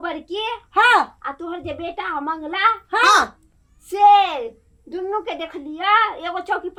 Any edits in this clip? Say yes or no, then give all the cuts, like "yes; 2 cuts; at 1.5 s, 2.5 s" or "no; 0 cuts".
no; 0 cuts